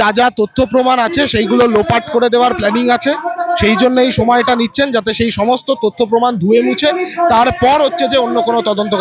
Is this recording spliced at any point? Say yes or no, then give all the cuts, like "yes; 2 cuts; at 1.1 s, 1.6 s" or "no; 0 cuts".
no; 0 cuts